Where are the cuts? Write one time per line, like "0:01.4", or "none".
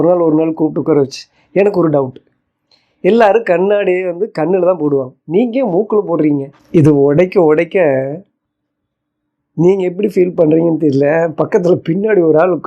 0:06.6

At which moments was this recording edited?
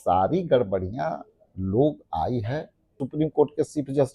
0:03.0

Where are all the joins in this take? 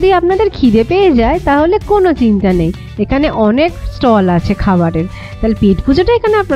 none

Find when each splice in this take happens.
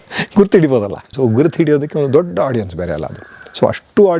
0:01.1

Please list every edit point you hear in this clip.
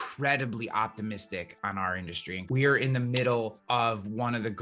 0:02.4
0:03.6

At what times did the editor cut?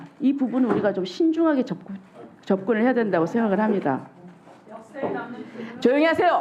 none

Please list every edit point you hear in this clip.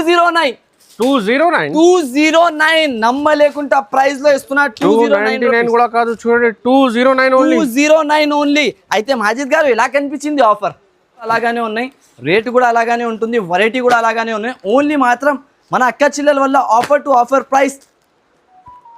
0:11.3

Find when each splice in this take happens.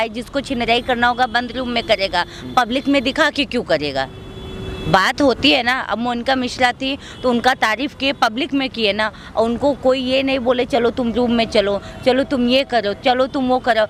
none

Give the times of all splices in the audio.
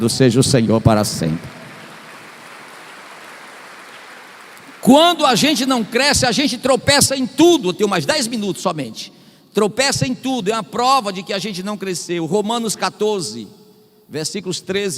none

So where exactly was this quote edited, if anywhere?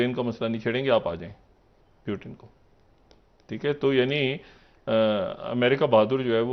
none

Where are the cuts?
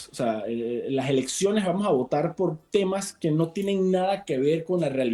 none

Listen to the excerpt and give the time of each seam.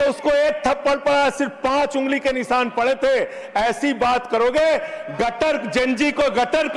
none

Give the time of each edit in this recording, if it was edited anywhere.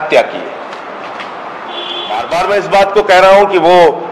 0:02.2

